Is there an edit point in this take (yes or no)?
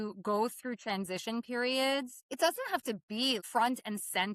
yes